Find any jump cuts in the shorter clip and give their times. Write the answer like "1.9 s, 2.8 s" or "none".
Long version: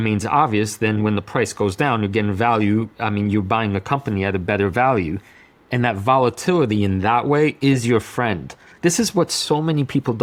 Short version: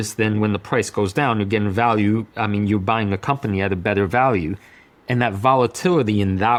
none

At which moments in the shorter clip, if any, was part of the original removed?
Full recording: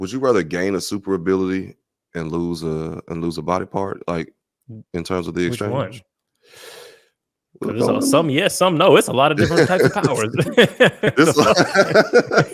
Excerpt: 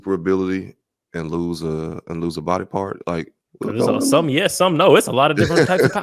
3.4 s

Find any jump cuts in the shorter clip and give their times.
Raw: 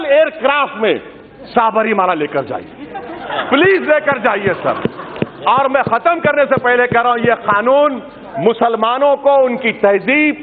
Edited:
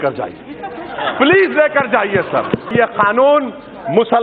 2.7 s

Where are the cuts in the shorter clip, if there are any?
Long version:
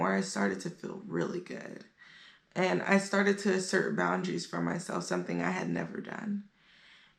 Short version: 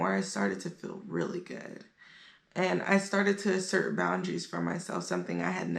none

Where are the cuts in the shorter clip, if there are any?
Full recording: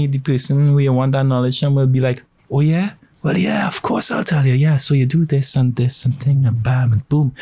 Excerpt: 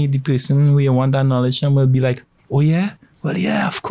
none

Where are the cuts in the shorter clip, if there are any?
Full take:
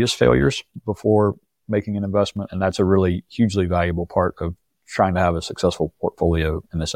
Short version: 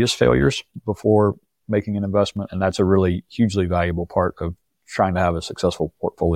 none

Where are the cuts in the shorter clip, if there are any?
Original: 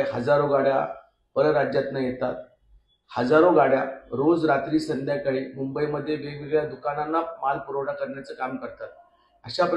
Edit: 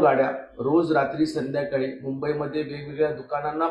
none

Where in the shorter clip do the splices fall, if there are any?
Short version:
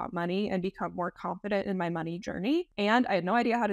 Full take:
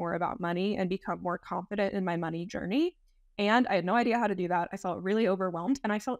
2.7 s

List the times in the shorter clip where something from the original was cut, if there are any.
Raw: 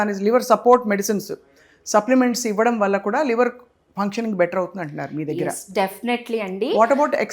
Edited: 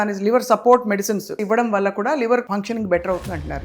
1.4 s, 2.5 s

